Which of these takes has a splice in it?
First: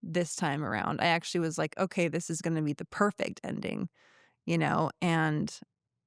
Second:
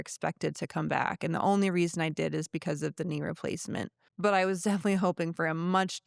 second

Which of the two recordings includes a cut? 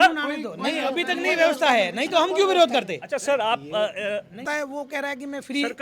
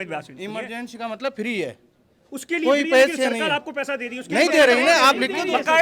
first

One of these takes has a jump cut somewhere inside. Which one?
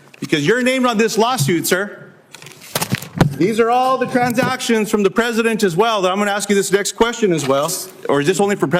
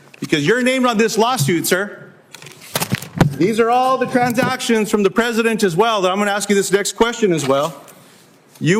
first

